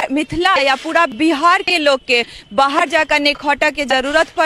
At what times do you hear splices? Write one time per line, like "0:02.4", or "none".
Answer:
none